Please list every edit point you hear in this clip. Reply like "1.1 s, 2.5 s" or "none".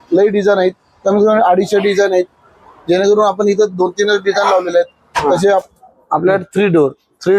5.6 s